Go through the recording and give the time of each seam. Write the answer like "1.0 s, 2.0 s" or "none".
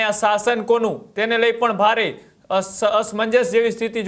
none